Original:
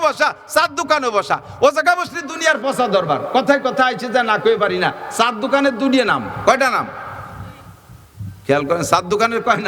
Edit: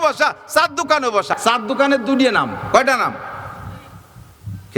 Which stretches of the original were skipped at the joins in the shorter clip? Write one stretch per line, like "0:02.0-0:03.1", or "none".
0:01.3-0:05.1